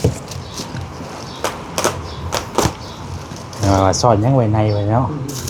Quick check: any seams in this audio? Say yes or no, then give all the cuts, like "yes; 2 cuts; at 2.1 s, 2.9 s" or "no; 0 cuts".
no; 0 cuts